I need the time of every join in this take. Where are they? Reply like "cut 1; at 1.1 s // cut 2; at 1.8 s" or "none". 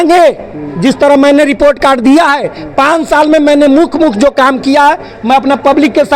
none